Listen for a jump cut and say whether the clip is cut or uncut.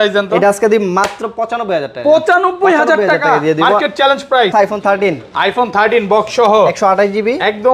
cut